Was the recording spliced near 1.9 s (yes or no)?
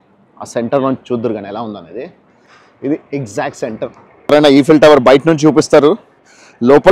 no